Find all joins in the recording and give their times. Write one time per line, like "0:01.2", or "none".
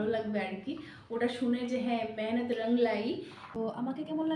0:03.4